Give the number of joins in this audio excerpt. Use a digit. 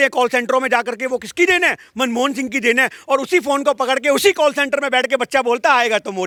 0